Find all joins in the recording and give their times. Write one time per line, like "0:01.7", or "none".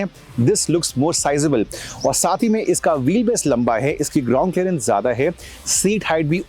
none